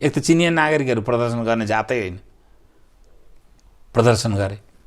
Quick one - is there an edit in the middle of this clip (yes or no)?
no